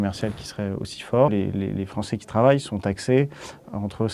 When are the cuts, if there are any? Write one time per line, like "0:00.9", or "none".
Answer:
0:01.3